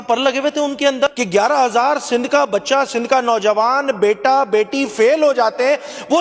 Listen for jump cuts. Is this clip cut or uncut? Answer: cut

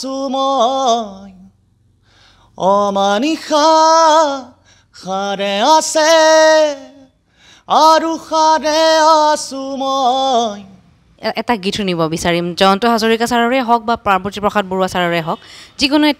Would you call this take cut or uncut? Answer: cut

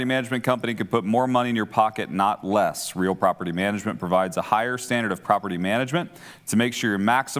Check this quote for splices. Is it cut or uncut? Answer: uncut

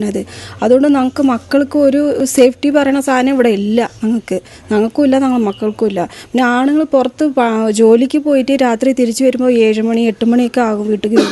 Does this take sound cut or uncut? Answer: uncut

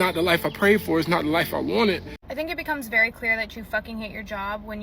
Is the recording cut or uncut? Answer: cut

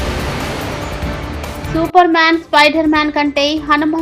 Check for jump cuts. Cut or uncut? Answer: uncut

